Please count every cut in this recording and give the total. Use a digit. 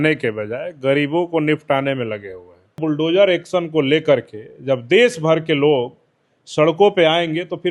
1